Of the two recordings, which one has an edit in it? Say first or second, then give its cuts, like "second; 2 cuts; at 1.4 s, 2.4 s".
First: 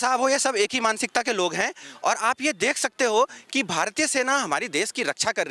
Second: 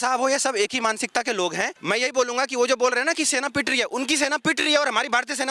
second; 1 cut; at 1.8 s